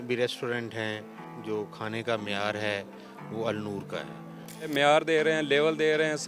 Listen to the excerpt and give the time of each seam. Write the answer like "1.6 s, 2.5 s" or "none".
1.3 s, 4.7 s